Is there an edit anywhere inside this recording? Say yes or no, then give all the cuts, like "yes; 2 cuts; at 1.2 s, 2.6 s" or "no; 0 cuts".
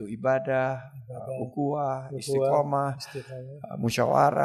no; 0 cuts